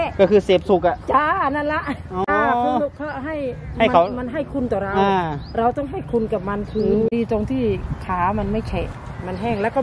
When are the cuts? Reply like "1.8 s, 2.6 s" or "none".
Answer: 2.3 s, 7.1 s